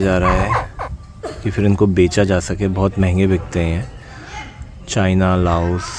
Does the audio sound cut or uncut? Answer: uncut